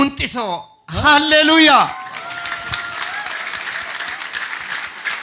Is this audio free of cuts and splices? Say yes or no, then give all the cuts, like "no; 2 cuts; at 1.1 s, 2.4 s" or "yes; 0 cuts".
yes; 0 cuts